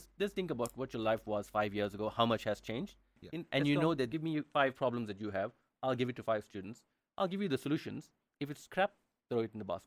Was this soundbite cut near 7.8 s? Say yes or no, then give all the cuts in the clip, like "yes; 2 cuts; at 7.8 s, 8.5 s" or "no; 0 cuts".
no; 1 cut; at 4.1 s